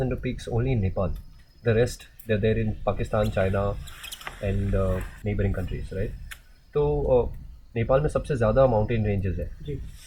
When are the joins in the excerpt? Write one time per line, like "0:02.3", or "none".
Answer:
0:05.1